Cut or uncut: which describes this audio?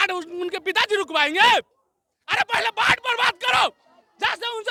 uncut